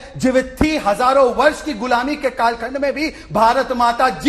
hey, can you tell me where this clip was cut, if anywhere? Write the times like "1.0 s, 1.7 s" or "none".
none